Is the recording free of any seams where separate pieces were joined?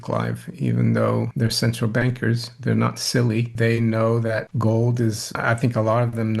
no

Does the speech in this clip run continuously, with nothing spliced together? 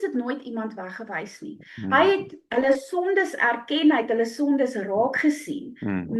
yes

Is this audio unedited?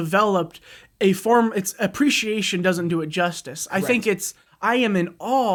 yes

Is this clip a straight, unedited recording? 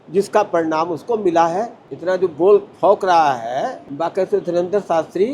no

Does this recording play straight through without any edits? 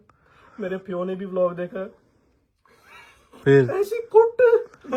yes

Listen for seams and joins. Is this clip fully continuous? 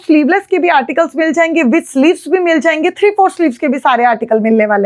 yes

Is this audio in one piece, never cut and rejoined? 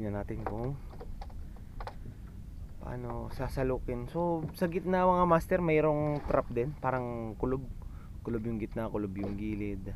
yes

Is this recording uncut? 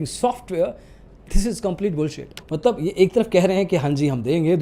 no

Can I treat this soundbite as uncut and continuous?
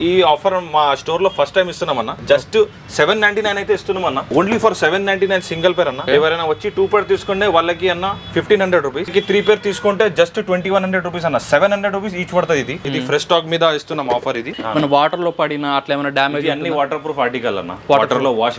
no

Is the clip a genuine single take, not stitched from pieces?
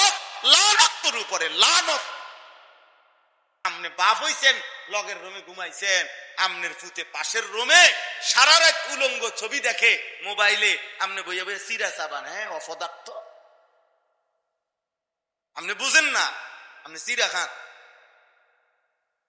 no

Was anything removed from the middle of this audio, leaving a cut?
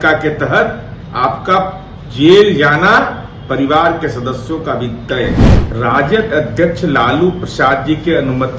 yes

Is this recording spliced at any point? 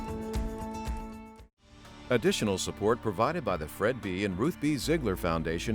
yes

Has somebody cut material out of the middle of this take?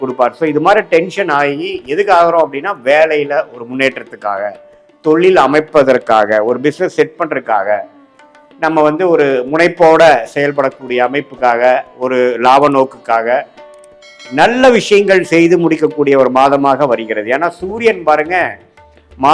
no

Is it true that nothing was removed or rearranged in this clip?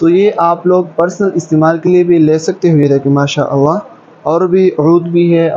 yes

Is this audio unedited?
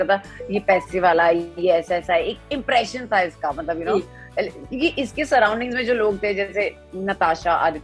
yes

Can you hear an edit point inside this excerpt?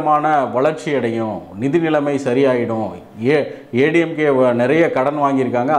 no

